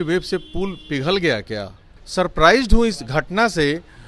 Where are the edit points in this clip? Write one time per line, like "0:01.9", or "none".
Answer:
0:01.9